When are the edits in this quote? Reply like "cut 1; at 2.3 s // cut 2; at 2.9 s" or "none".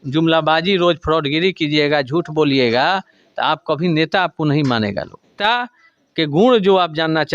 cut 1; at 5.4 s